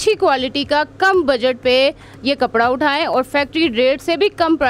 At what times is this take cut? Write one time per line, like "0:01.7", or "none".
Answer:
none